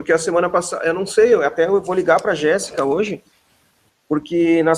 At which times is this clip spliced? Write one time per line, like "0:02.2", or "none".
none